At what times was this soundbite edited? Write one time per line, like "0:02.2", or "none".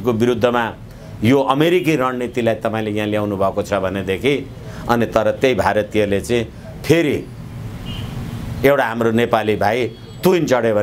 none